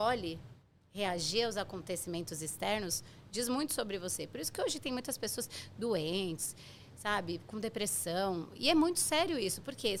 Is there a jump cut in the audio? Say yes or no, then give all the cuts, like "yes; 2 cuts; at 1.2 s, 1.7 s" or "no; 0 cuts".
no; 0 cuts